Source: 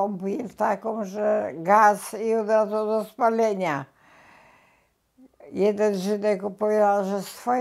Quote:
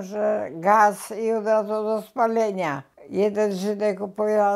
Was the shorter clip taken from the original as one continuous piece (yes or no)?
no